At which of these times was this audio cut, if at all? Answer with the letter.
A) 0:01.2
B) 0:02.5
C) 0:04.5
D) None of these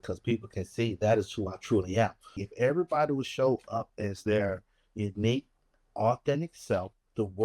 B